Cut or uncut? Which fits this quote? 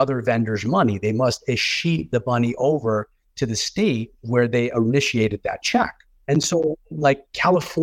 uncut